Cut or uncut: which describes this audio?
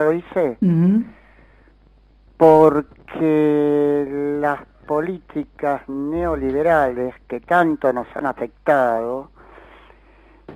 uncut